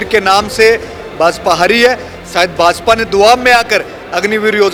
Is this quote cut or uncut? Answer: uncut